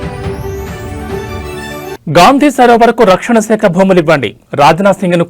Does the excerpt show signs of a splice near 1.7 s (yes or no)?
yes